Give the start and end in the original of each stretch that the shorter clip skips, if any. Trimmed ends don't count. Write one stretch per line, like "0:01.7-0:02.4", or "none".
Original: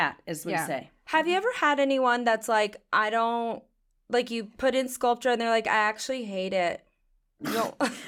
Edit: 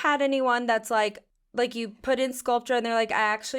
0:02.8-0:03.8